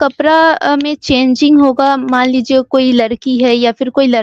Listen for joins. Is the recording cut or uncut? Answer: uncut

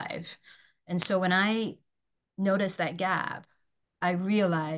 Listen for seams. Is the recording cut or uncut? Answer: uncut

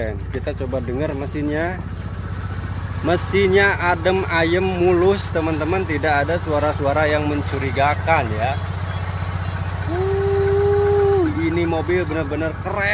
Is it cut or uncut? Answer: uncut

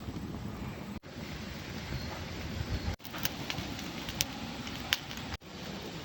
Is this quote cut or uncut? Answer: cut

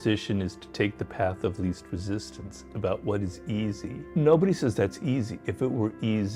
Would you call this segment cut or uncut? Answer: cut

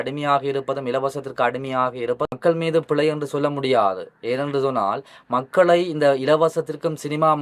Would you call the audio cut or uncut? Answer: cut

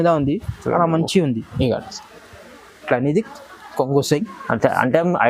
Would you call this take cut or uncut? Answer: cut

